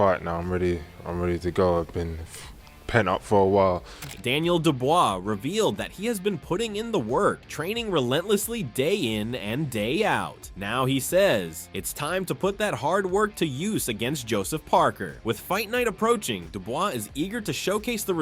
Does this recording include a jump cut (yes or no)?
no